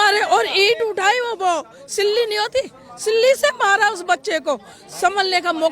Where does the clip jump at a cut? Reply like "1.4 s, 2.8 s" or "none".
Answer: none